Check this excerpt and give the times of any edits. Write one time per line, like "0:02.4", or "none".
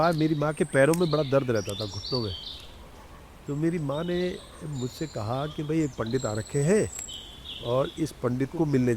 none